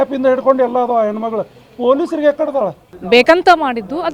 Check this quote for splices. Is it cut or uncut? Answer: cut